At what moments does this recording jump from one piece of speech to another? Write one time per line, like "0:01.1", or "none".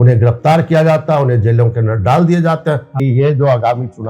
0:02.9